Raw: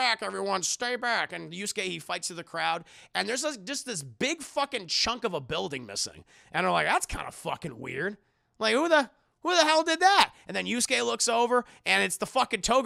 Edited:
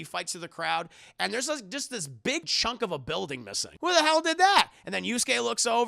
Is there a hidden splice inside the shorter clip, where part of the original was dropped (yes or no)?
yes